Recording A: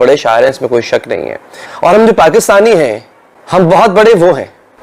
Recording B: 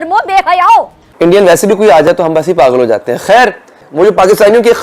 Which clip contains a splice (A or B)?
B